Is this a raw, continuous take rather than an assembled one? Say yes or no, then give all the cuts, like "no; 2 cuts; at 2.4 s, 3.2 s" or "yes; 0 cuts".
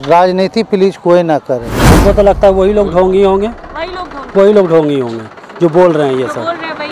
no; 1 cut; at 1.8 s